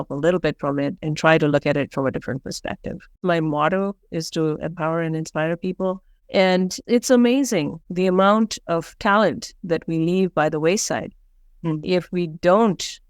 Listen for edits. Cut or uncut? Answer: cut